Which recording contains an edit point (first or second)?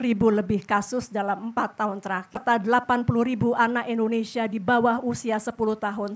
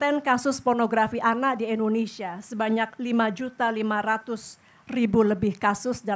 first